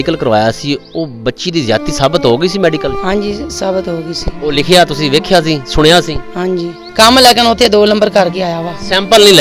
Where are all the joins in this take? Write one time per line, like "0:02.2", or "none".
0:06.8